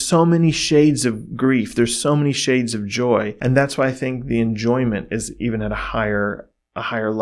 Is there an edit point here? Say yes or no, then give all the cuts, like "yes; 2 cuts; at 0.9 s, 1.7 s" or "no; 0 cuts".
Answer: yes; 1 cut; at 3.3 s